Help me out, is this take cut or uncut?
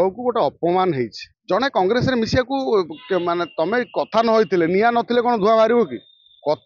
cut